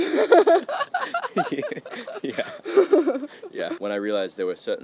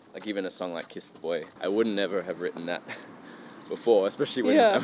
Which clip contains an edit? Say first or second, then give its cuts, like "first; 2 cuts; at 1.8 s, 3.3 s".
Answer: first; 1 cut; at 3.7 s